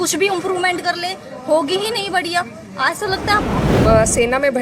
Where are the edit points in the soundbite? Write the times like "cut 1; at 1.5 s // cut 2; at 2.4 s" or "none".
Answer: cut 1; at 3.7 s

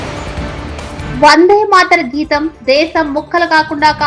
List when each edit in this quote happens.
cut 1; at 1.0 s

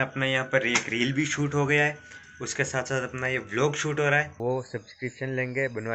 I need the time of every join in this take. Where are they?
cut 1; at 4.3 s

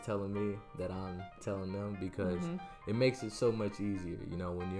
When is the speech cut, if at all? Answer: cut 1; at 1.4 s

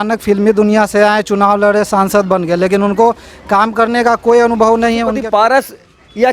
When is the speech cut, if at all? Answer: cut 1; at 5.1 s

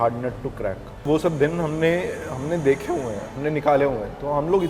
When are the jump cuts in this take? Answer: cut 1; at 1.0 s

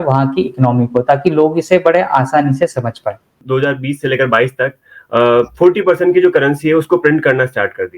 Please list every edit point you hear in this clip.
cut 1; at 3.4 s

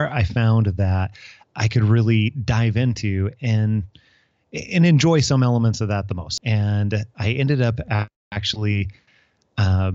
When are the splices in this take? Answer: cut 1; at 6.2 s

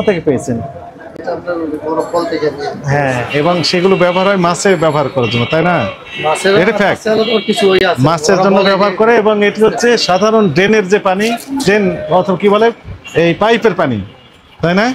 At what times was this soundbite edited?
none

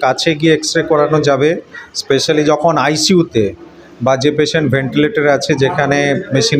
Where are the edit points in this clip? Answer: none

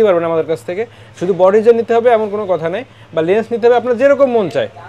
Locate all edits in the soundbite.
none

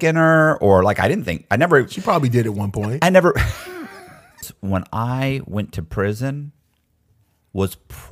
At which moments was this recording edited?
cut 1; at 4.5 s

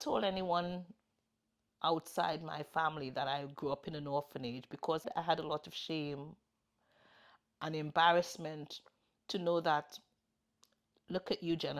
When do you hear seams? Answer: cut 1; at 5.0 s

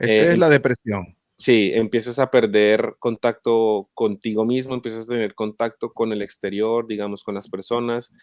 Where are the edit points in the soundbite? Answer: none

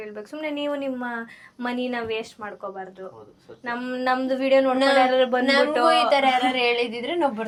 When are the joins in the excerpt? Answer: none

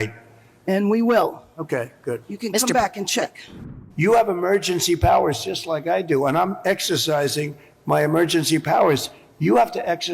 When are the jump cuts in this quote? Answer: cut 1; at 3.7 s

